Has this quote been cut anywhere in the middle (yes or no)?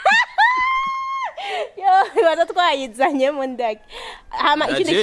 no